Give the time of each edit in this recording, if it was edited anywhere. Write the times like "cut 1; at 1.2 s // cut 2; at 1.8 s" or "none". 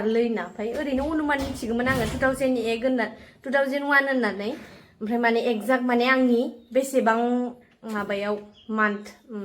none